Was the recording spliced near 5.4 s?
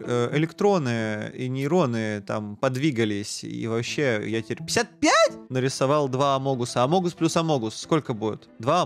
yes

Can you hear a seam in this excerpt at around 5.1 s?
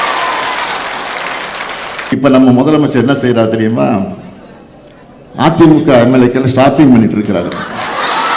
no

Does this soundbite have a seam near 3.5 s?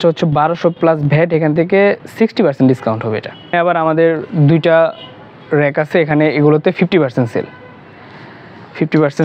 yes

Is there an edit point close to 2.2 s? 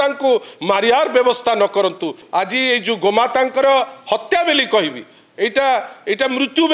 yes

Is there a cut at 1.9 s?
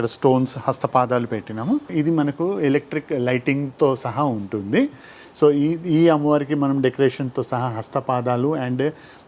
yes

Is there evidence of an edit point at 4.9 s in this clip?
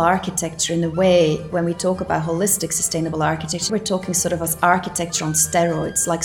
no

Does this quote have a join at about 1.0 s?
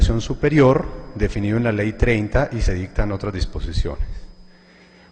yes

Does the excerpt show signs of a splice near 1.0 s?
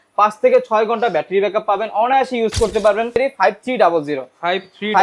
no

